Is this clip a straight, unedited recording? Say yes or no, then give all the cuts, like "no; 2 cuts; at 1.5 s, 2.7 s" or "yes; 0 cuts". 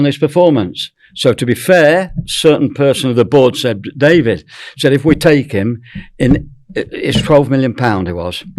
yes; 0 cuts